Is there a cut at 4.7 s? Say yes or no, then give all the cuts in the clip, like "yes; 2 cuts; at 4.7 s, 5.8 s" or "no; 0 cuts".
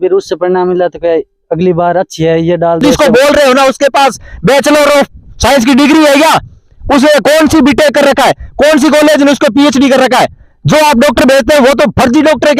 no; 1 cut; at 2.9 s